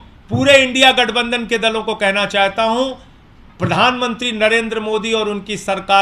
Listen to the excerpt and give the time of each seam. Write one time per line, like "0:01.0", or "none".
none